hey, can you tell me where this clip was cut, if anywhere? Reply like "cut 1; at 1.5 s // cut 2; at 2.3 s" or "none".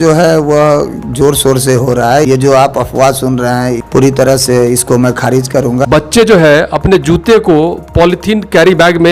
cut 1; at 2.3 s // cut 2; at 3.8 s // cut 3; at 5.8 s